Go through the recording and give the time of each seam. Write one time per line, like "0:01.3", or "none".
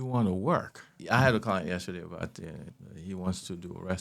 0:01.0
0:02.7